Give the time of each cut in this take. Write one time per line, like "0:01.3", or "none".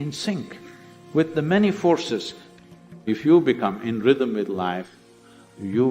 0:02.4